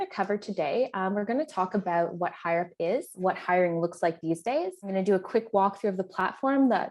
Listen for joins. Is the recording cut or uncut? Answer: cut